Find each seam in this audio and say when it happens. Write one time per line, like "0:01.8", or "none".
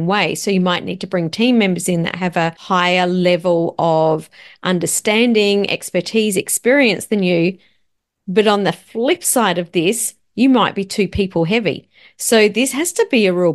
0:02.6